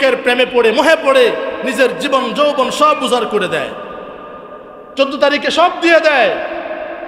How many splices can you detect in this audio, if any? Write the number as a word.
zero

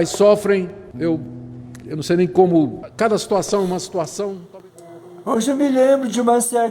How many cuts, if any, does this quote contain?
one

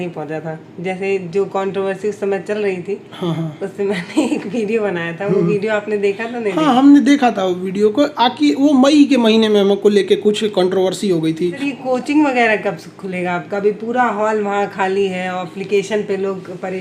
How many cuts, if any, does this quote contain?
one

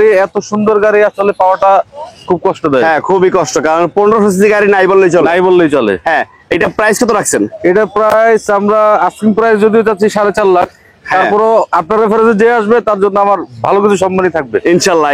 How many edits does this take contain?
zero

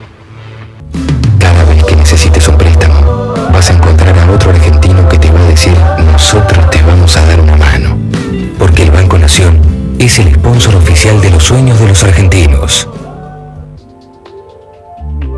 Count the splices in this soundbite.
one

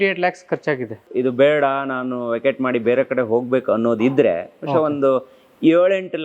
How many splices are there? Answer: one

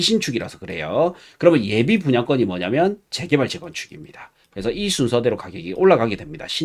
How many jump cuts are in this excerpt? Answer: zero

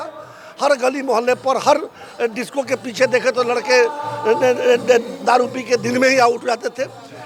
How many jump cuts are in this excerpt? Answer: zero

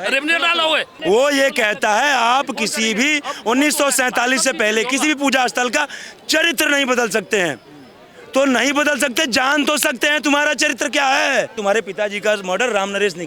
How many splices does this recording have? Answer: two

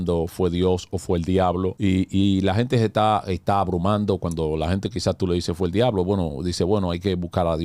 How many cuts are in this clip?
one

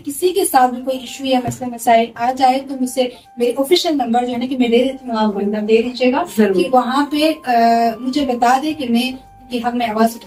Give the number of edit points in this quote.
zero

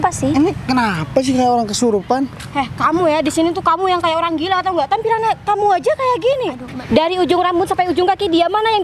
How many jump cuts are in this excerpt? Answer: one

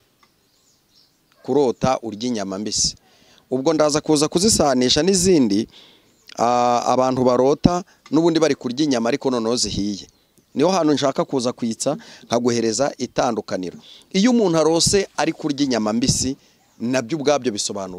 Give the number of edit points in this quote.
zero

